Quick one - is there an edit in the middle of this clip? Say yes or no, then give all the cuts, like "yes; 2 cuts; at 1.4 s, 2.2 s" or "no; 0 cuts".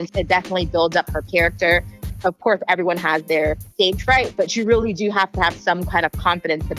yes; 2 cuts; at 2.0 s, 3.6 s